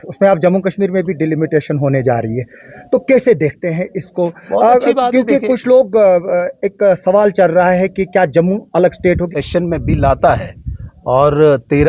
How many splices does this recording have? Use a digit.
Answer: 1